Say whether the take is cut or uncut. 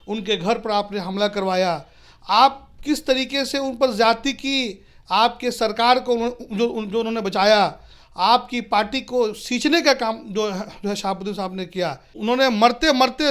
cut